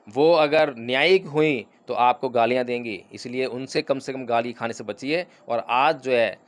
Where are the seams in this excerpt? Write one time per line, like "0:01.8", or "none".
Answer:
none

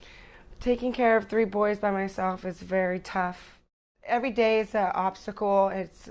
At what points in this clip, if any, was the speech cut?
none

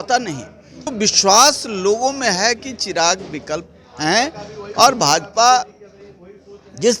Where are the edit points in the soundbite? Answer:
0:00.9

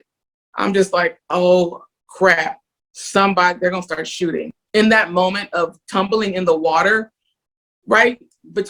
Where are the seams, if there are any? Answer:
0:04.5

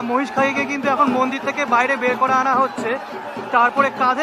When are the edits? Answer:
none

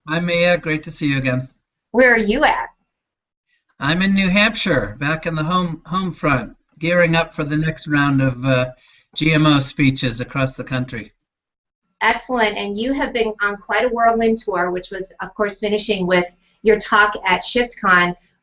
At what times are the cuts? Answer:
0:16.3

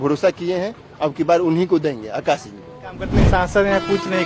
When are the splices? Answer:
0:03.2

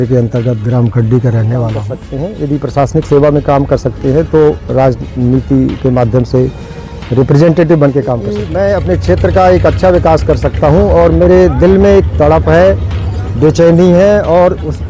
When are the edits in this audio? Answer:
0:02.0
0:08.4

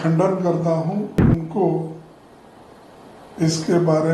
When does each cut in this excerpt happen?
0:01.2

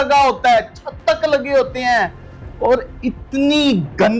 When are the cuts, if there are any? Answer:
none

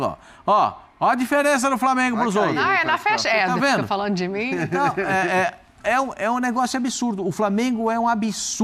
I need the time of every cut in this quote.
none

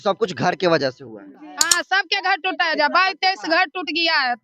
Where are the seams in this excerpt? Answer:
0:01.6

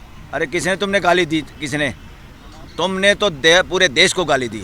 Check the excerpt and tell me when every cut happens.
none

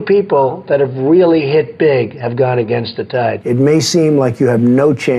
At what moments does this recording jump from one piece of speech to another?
0:03.4

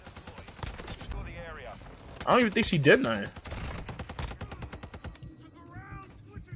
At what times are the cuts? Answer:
0:01.1

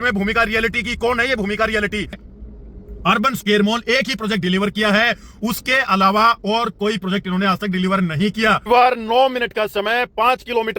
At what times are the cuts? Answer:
0:02.3
0:08.6

